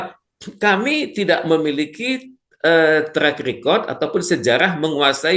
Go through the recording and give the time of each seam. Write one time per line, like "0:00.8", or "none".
none